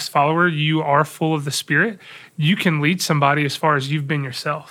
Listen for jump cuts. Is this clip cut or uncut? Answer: uncut